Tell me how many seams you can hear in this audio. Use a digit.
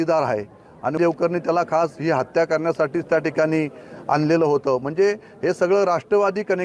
1